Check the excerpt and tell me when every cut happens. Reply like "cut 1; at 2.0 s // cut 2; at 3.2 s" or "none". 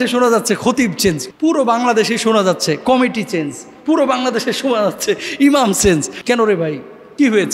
cut 1; at 1.2 s // cut 2; at 6.2 s